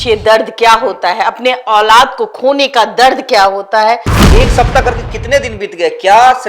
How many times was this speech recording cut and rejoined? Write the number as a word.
one